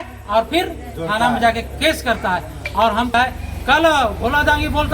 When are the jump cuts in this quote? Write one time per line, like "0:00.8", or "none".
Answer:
0:03.1